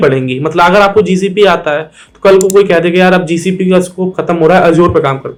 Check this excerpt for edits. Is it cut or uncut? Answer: uncut